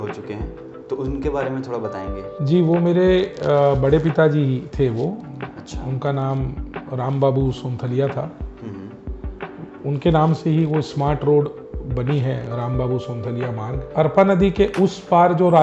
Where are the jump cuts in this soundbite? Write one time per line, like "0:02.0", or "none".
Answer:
0:13.8

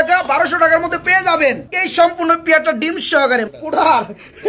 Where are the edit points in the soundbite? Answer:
0:03.5

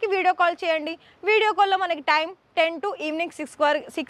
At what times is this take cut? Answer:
none

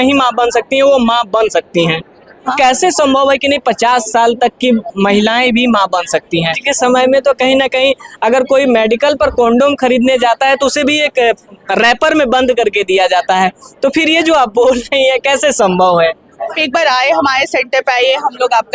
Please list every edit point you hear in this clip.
0:02.5
0:06.6
0:16.6

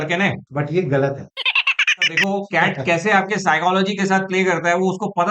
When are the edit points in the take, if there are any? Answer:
0:02.1

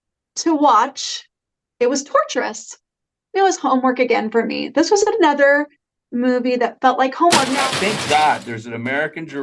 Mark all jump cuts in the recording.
0:07.5

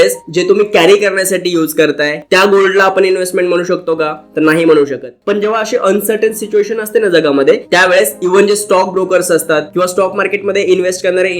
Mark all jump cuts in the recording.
0:02.2
0:05.2

